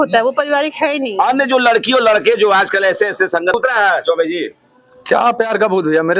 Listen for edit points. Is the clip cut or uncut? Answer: cut